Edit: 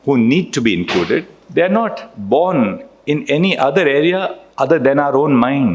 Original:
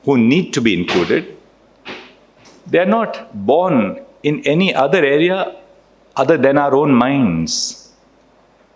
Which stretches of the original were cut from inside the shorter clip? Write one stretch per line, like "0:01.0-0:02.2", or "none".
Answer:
0:01.4-0:02.5
0:05.6-0:06.0